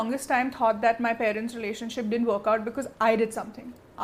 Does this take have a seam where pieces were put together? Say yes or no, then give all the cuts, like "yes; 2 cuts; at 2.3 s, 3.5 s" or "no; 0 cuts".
no; 0 cuts